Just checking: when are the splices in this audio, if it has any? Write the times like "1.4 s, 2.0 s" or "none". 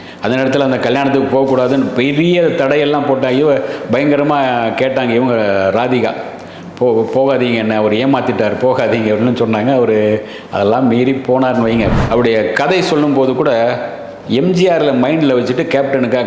11.9 s